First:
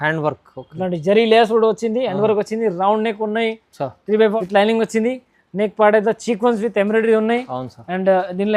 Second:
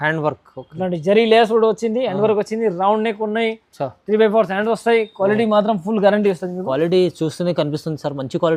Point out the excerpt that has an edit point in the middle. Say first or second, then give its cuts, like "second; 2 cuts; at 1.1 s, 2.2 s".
first; 1 cut; at 4.4 s